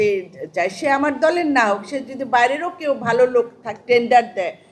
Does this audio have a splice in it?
no; 0 cuts

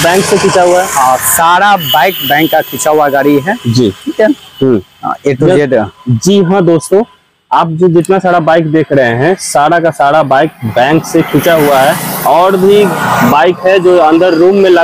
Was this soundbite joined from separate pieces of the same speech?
no; 0 cuts

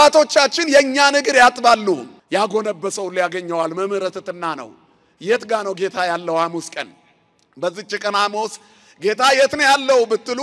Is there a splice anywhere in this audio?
yes; 1 cut; at 2.1 s

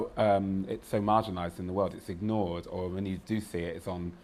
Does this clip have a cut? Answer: no; 0 cuts

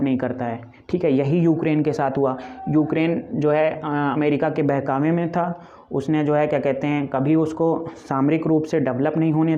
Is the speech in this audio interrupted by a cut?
no; 0 cuts

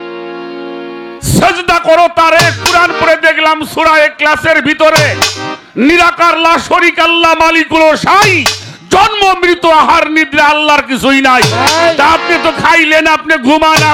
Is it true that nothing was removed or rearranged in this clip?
yes; 0 cuts

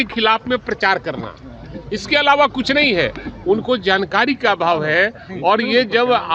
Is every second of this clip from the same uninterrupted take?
yes; 0 cuts

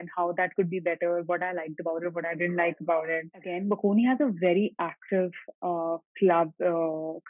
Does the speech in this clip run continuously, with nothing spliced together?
no; 1 cut; at 3.5 s

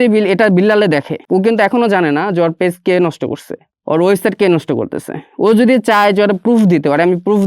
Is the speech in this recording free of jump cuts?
no; 1 cut; at 1.2 s

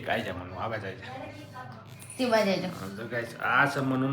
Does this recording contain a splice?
no; 0 cuts

